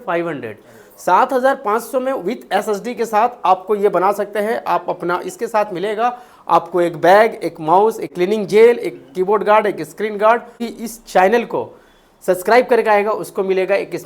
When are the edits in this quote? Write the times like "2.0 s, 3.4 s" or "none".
8.1 s, 10.7 s